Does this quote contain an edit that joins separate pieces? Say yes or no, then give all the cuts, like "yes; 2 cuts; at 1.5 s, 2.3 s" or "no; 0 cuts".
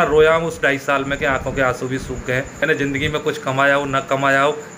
yes; 1 cut; at 2.6 s